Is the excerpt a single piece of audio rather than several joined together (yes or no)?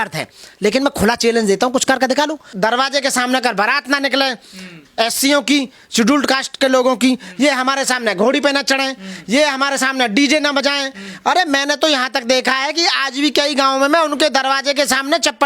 no